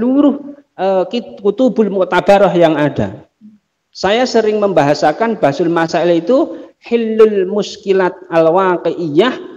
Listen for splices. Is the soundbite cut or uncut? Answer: uncut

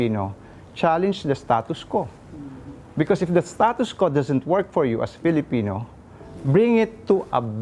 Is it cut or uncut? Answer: uncut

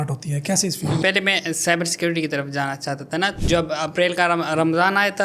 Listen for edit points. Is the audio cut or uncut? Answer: cut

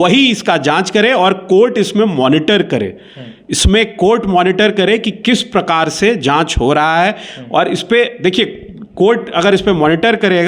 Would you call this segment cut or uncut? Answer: uncut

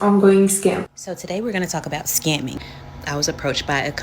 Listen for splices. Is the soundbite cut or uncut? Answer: cut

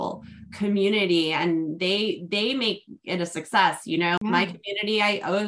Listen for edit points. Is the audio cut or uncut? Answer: cut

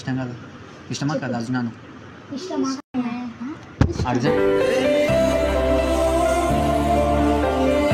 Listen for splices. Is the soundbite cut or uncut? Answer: uncut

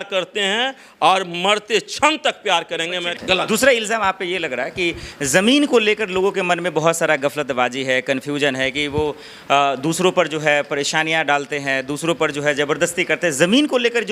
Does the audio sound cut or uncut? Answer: cut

